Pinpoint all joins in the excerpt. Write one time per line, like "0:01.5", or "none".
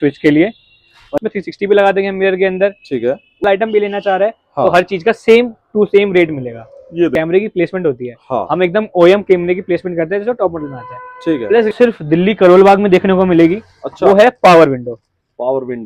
0:01.1
0:03.4
0:07.1
0:11.7